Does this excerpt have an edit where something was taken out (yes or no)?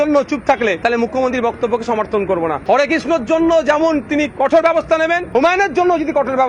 yes